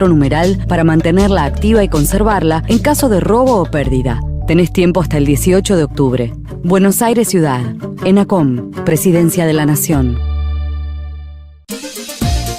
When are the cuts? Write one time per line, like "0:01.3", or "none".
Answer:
0:11.7